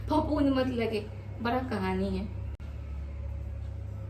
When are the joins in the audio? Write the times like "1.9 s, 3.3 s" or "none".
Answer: none